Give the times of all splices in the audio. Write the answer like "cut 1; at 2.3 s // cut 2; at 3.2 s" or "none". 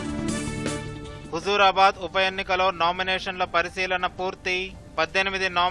cut 1; at 1.1 s